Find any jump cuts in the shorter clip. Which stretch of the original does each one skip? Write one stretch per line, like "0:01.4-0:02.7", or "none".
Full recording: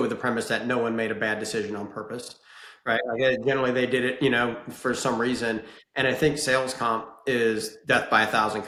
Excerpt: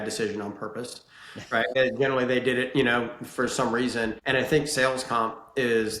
0:03.1-0:03.2
0:05.7-0:05.9